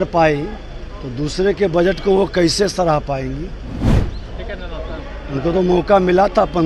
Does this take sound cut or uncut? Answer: uncut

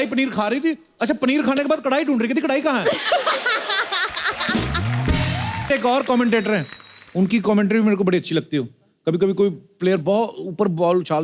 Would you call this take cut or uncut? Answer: cut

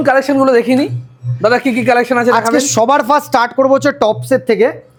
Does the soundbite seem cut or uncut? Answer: uncut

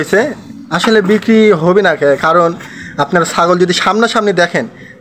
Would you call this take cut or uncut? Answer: uncut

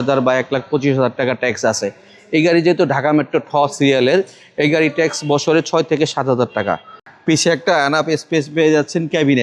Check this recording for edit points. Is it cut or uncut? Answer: cut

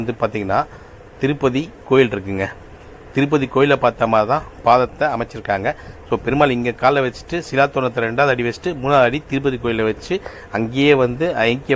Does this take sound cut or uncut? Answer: uncut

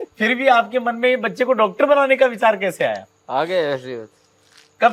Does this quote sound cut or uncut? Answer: uncut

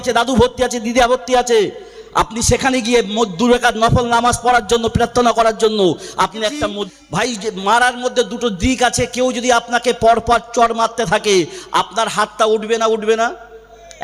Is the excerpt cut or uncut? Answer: cut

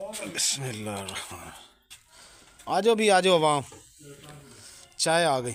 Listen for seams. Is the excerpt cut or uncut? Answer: uncut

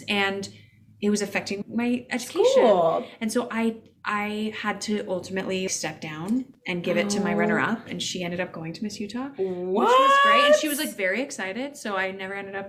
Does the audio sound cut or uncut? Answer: uncut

